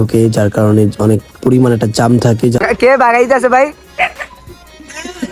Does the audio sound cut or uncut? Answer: cut